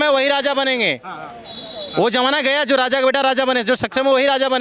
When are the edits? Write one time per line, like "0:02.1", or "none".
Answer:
none